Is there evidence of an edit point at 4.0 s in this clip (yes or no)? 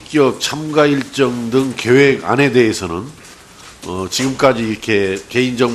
no